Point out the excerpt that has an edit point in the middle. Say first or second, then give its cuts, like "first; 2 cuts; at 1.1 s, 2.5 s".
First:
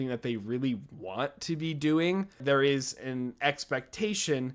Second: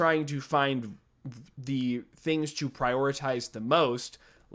first; 1 cut; at 2.4 s